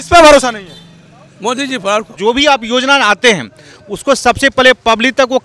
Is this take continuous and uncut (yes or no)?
no